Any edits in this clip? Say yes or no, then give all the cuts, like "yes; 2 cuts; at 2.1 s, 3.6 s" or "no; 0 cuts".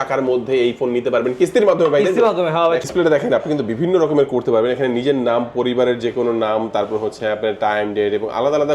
yes; 1 cut; at 2.8 s